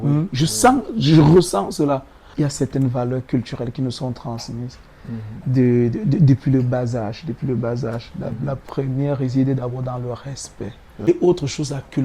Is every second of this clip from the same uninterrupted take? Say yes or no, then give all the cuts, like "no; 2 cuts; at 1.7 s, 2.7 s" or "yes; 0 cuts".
no; 2 cuts; at 2.2 s, 11.0 s